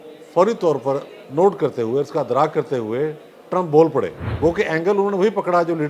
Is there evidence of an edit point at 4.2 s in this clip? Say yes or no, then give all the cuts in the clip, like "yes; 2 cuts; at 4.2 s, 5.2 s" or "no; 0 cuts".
yes; 2 cuts; at 1.2 s, 4.2 s